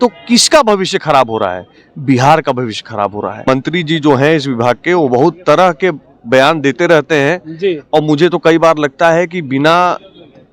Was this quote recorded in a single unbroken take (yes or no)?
no